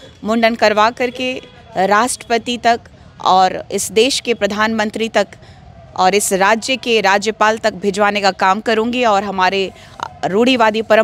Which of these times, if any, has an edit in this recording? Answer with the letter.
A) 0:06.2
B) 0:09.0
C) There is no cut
C